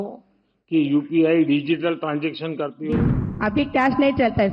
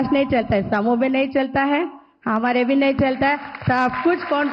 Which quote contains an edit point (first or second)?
first